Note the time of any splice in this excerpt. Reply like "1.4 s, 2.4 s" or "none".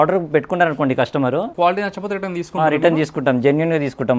1.5 s